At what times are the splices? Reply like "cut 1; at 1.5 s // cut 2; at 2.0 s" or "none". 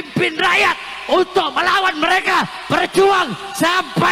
none